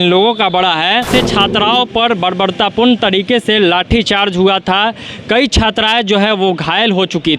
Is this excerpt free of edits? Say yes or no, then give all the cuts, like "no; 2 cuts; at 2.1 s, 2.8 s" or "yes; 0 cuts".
no; 1 cut; at 1.1 s